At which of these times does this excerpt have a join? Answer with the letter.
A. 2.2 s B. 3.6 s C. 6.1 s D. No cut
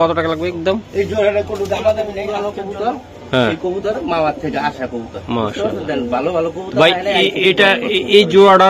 A